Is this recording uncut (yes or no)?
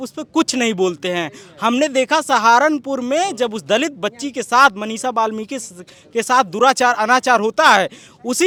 yes